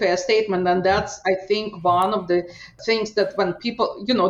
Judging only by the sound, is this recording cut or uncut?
uncut